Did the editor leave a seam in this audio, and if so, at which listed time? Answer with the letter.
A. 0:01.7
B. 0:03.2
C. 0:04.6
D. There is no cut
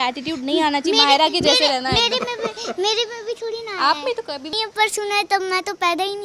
C